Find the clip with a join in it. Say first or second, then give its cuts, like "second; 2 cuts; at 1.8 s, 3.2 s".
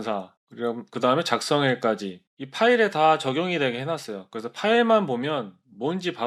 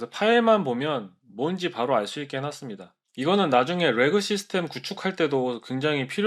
second; 1 cut; at 3.0 s